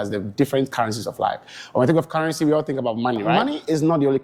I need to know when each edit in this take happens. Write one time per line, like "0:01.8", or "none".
0:03.3